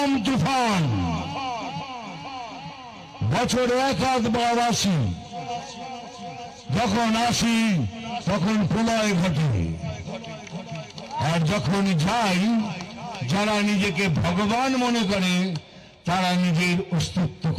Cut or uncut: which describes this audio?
uncut